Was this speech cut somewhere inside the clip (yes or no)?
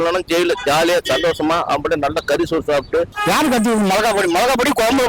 yes